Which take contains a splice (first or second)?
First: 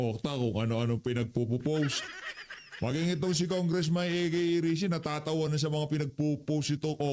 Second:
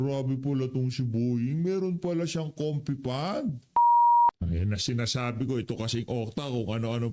first